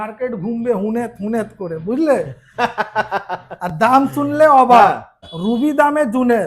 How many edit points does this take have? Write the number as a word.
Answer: one